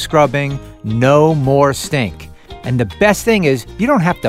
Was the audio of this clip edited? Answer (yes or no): no